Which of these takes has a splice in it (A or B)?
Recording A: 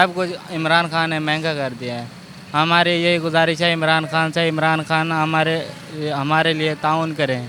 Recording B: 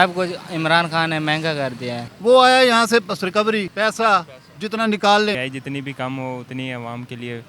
B